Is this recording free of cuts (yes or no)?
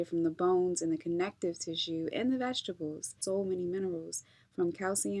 no